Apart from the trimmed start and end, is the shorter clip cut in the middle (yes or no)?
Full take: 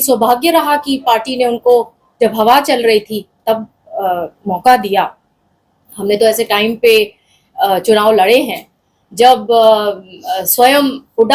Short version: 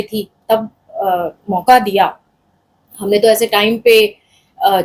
no